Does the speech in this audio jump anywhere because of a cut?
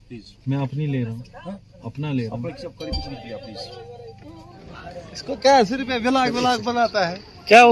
yes; 1 cut; at 4.8 s

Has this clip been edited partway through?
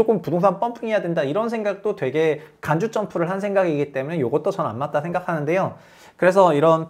no; 0 cuts

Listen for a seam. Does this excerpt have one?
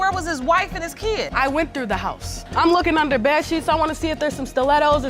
no; 0 cuts

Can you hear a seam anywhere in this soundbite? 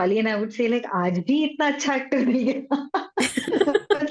no; 0 cuts

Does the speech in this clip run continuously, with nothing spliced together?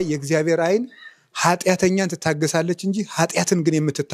yes; 0 cuts

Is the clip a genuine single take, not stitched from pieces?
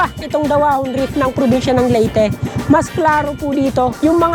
yes; 0 cuts

